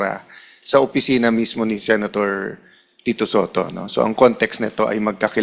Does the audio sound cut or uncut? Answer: uncut